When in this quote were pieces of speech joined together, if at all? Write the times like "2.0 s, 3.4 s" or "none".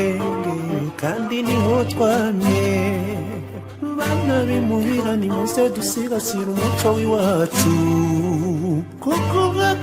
none